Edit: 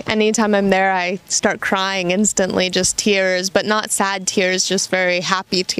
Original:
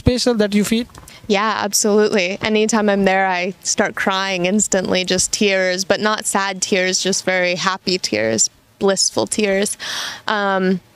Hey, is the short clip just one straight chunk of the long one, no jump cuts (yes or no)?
yes